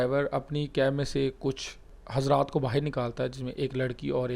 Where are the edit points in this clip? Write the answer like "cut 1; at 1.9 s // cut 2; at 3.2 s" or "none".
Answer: none